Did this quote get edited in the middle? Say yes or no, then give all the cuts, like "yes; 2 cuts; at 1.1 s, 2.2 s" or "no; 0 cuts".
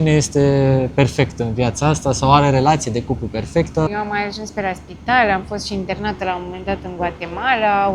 yes; 1 cut; at 3.9 s